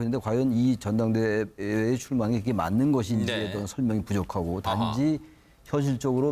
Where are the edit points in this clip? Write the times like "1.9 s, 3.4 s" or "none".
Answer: 5.2 s